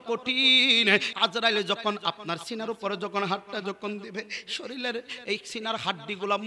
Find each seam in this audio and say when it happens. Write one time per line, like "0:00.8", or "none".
0:01.1